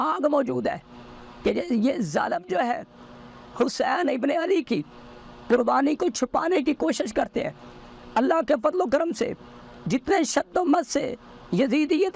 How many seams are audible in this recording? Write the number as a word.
zero